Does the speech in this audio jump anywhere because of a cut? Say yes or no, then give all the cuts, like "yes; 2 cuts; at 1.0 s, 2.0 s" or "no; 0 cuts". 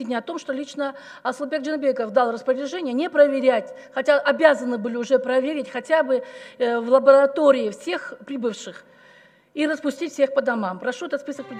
no; 0 cuts